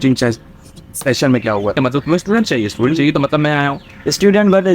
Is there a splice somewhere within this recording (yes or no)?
yes